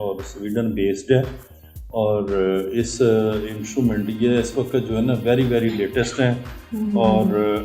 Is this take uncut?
yes; 0 cuts

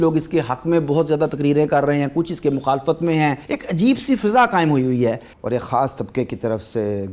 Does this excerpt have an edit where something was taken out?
yes; 2 cuts; at 3.5 s, 5.3 s

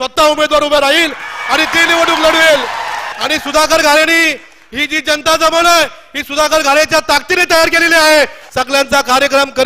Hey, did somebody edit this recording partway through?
yes; 2 cuts; at 3.1 s, 8.5 s

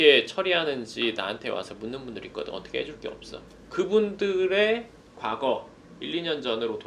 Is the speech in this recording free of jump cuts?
yes; 0 cuts

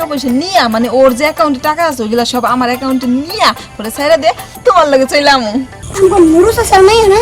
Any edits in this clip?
yes; 1 cut; at 5.8 s

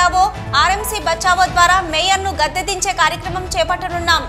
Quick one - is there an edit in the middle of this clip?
no; 0 cuts

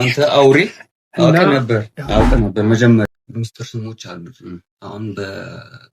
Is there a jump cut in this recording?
yes; 1 cut; at 3.1 s

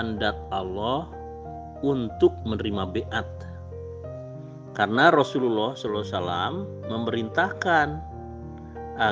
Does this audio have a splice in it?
no; 0 cuts

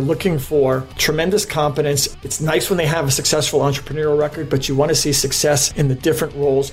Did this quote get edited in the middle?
no; 0 cuts

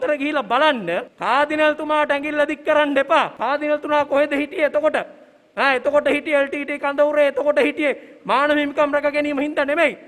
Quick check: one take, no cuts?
no; 2 cuts; at 1.1 s, 3.4 s

